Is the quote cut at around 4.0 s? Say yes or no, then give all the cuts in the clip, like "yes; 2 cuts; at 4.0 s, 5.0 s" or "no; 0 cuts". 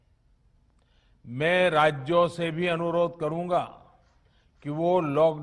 no; 0 cuts